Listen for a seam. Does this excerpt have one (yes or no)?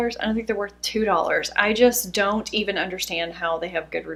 no